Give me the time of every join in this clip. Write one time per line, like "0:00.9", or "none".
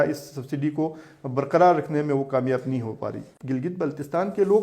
0:03.3